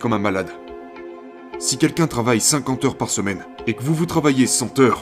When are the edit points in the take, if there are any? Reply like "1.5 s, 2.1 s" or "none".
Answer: 1.1 s, 3.5 s